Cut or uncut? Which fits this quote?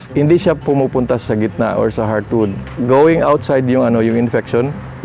cut